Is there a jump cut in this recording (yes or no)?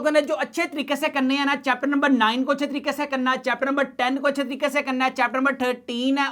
no